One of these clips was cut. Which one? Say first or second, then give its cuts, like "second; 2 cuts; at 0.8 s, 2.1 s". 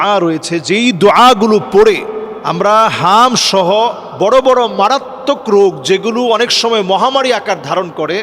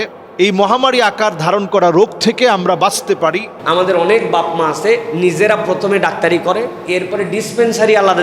second; 1 cut; at 3.5 s